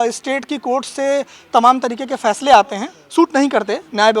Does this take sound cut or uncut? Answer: cut